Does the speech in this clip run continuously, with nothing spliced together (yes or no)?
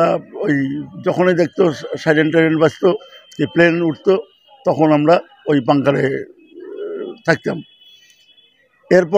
yes